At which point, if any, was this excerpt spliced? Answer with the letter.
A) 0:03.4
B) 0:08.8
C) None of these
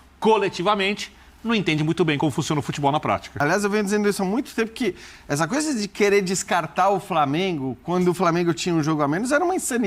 A